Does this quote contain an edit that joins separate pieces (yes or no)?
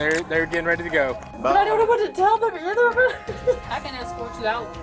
yes